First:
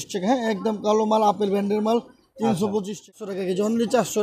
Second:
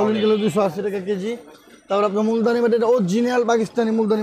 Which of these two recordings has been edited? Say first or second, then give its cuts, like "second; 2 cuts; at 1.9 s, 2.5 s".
first; 1 cut; at 3.1 s